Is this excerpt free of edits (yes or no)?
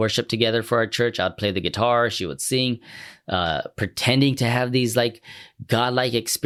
yes